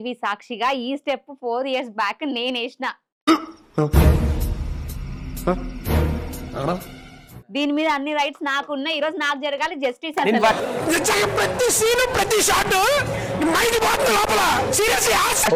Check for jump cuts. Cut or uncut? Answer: uncut